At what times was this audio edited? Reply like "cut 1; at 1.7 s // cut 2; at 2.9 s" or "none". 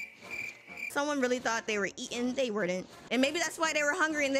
cut 1; at 0.9 s // cut 2; at 2.9 s